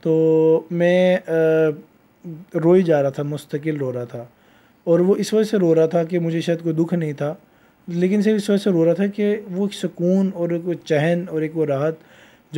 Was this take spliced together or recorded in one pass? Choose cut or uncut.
uncut